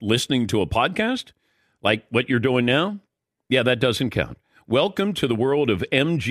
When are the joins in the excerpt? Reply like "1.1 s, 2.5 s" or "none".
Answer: none